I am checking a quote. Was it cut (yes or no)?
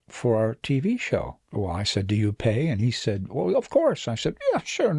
yes